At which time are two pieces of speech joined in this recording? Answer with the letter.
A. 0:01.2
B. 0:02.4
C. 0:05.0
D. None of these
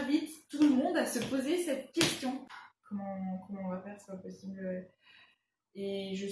B